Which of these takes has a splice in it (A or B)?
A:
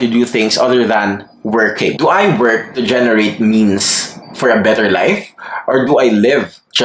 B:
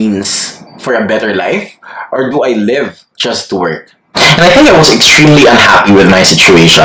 A